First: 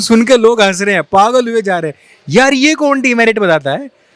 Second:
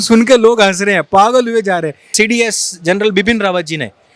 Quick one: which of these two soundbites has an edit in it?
second; 1 cut; at 2.1 s

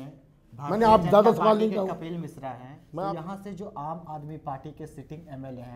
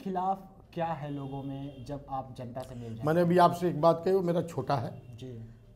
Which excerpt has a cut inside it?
first; 1 cut; at 2.9 s

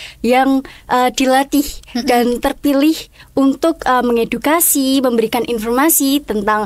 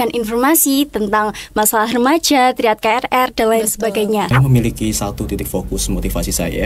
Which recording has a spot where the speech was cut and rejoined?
second; 1 cut; at 4.3 s

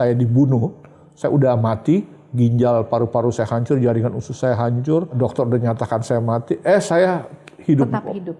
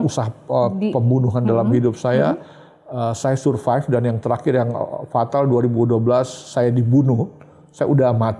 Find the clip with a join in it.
first; 1 cut; at 5.1 s

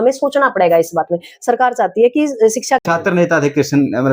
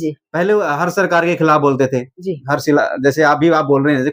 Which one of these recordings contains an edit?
first; 1 cut; at 2.8 s

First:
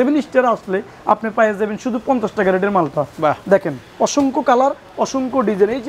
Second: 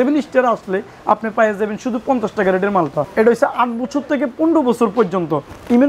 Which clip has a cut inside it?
second; 1 cut; at 3.1 s

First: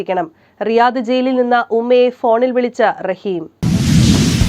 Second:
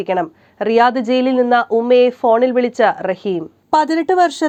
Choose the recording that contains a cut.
first; 1 cut; at 3.6 s

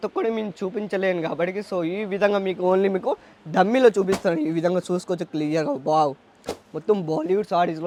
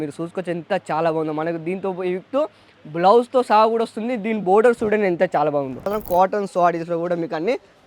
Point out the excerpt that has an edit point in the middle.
second; 1 cut; at 5.9 s

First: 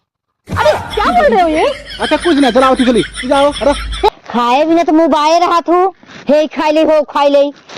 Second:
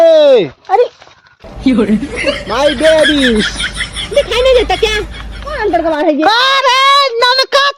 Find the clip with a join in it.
first; 1 cut; at 4.1 s

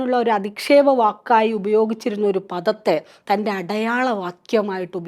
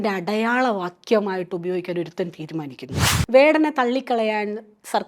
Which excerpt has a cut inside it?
second; 1 cut; at 3.1 s

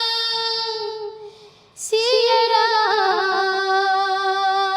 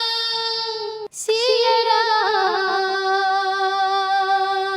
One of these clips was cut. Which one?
second; 1 cut; at 1.1 s

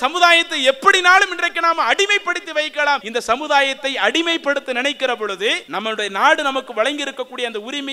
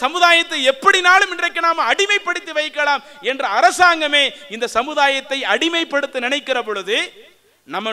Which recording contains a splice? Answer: first; 2 cuts; at 3.1 s, 5.6 s

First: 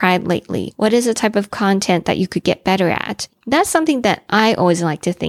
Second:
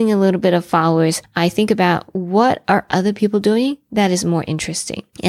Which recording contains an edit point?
first; 1 cut; at 3.2 s

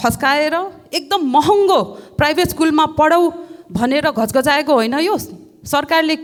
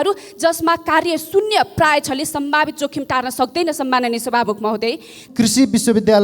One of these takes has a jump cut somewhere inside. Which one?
second; 1 cut; at 5.1 s

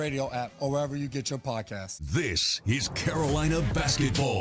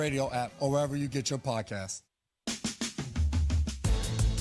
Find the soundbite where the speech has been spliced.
first; 1 cut; at 1.9 s

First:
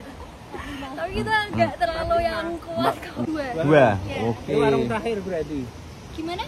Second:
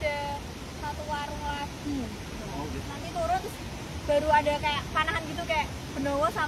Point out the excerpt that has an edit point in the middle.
first; 1 cut; at 3.1 s

